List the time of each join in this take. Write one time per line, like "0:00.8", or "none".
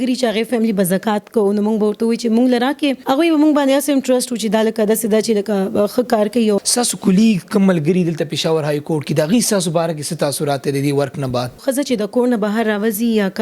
0:03.0
0:06.7
0:11.6